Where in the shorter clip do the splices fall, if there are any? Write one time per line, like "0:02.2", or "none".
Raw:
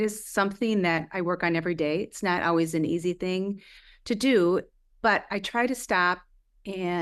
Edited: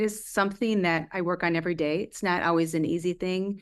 none